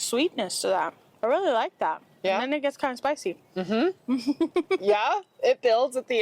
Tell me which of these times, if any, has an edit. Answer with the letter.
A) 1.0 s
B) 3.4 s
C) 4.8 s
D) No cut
A